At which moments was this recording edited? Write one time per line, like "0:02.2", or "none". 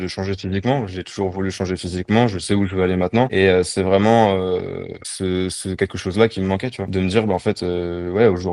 none